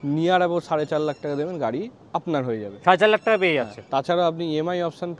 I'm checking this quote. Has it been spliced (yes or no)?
no